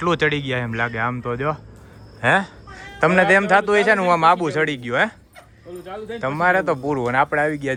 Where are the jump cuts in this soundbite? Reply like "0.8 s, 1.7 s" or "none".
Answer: none